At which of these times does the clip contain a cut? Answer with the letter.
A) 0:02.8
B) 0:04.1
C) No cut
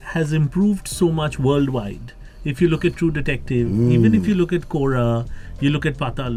C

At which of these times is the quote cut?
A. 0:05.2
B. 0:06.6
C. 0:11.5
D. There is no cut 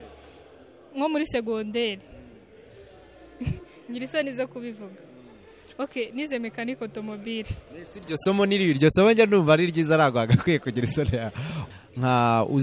C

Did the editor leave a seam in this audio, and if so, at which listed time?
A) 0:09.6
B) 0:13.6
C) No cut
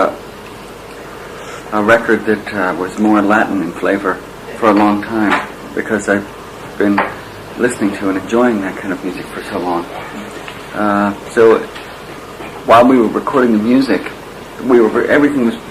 B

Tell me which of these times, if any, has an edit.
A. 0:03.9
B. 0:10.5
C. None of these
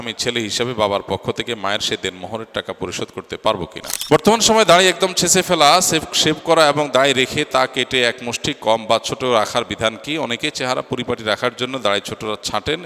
A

